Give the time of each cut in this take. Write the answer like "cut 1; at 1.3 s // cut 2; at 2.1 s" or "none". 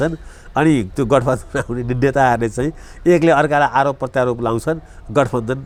none